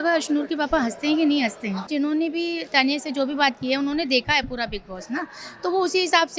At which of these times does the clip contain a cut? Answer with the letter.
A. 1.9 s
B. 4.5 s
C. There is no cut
A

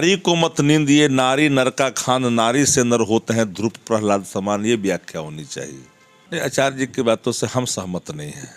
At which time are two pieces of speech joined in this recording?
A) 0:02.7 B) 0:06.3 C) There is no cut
B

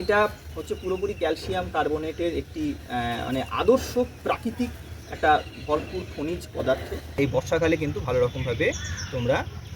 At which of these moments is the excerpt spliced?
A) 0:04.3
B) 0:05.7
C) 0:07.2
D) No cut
C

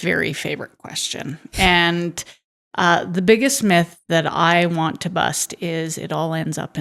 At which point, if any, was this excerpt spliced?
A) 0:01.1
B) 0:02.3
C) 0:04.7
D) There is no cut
D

